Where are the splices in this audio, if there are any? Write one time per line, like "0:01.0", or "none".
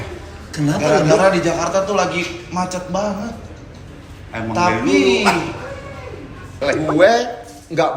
0:06.6